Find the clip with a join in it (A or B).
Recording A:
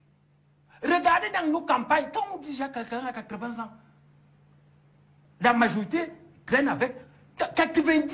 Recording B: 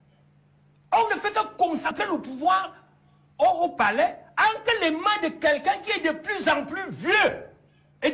B